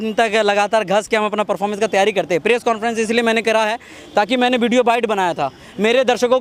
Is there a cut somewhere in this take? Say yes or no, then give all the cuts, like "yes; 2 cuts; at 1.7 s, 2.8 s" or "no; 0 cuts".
no; 0 cuts